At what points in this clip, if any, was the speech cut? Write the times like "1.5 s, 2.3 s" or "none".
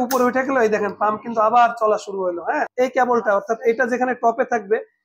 2.7 s